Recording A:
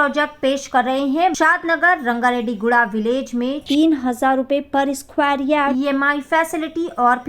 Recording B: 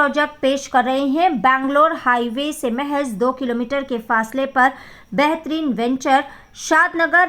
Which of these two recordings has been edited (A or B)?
A